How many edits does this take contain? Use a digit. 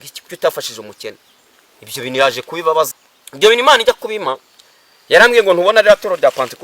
1